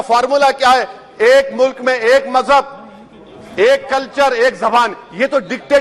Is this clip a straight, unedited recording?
yes; 0 cuts

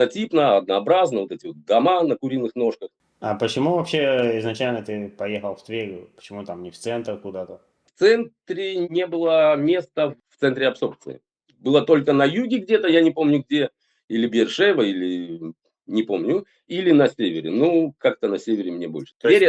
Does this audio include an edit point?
no; 0 cuts

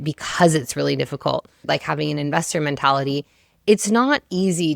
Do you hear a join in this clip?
yes; 1 cut; at 1.6 s

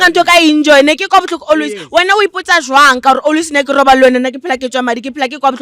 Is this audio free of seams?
yes; 0 cuts

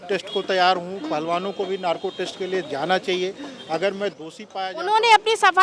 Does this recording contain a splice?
no; 0 cuts

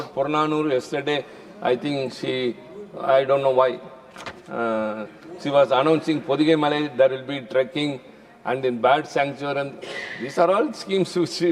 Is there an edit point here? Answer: no; 0 cuts

